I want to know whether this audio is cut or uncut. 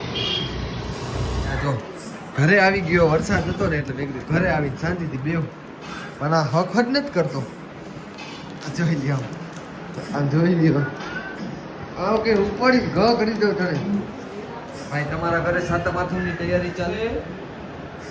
cut